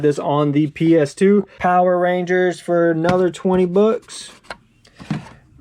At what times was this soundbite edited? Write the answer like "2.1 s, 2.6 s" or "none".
1.5 s